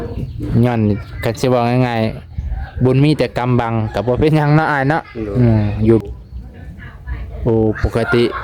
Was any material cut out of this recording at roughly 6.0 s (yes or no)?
yes